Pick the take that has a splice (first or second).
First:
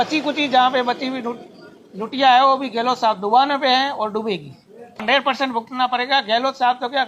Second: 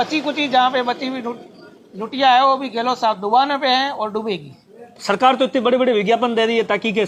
first